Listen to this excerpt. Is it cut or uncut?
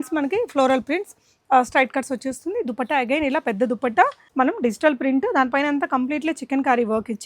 cut